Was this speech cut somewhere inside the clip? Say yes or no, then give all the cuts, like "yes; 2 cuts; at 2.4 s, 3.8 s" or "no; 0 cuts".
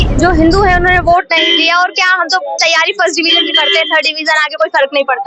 no; 0 cuts